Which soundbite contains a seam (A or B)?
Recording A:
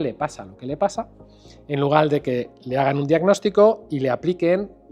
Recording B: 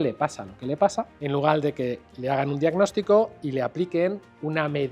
B